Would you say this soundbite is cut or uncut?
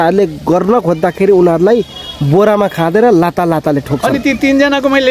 uncut